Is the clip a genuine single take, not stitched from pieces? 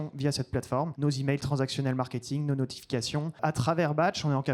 no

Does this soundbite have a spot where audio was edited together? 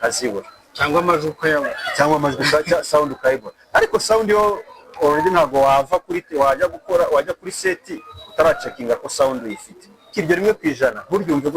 yes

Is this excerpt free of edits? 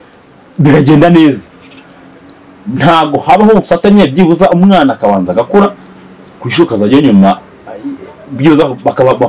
yes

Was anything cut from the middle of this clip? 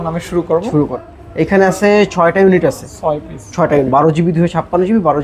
yes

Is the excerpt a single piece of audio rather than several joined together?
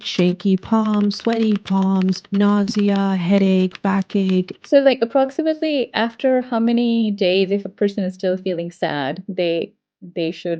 no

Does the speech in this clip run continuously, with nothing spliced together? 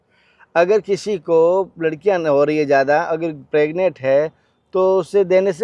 yes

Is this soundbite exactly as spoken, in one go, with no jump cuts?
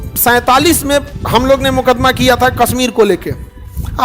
no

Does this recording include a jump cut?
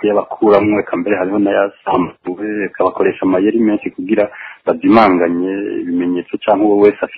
no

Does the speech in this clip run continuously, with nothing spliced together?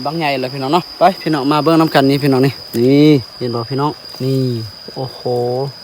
no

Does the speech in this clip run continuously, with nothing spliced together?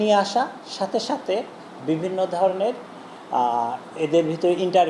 yes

